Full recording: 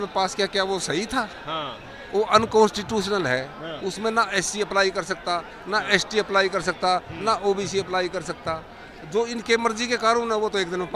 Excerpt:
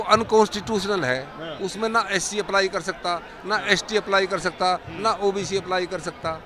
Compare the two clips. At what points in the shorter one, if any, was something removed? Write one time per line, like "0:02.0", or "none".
none